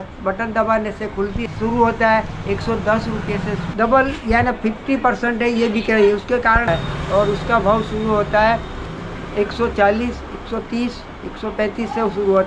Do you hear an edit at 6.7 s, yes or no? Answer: yes